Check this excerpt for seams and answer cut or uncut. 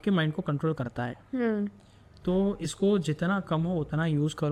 uncut